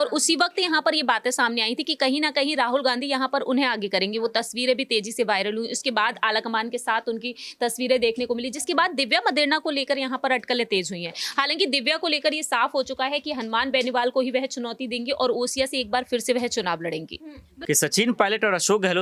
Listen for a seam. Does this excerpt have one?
yes; 1 cut; at 17.5 s

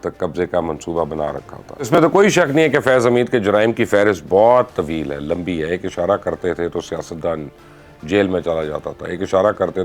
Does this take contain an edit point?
yes; 1 cut; at 2.0 s

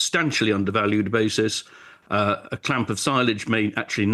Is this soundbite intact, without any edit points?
yes; 0 cuts

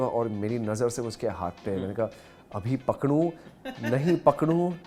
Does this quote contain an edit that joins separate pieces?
no; 0 cuts

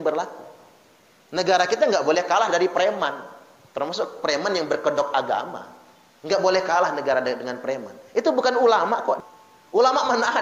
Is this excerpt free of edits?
no; 1 cut; at 9.2 s

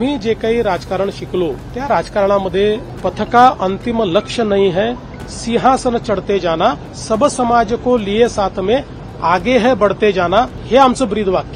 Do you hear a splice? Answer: yes; 4 cuts; at 1.7 s, 2.9 s, 6.9 s, 10.6 s

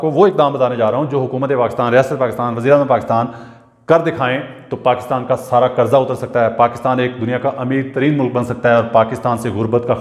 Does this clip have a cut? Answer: no; 0 cuts

